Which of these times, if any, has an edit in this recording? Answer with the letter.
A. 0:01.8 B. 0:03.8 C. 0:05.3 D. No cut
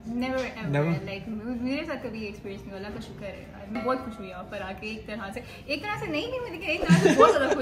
B